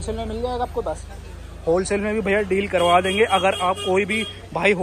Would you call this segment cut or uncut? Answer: uncut